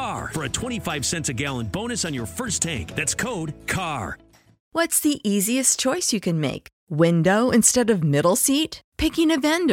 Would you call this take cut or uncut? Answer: cut